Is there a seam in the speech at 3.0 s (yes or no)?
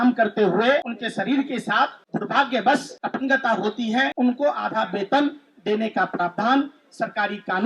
yes